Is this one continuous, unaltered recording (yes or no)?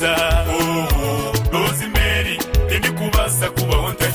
no